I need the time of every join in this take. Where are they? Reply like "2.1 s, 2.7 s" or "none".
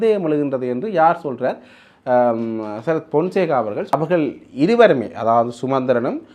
3.9 s